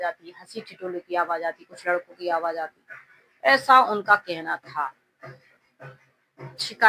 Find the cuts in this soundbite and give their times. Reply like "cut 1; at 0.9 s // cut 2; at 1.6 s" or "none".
none